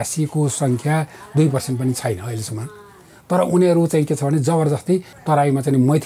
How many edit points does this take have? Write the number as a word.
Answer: one